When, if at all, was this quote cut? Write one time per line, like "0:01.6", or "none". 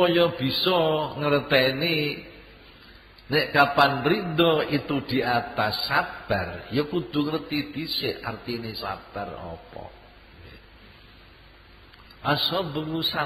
0:10.7